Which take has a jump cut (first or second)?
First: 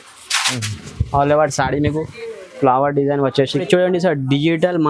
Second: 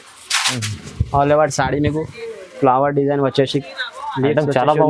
first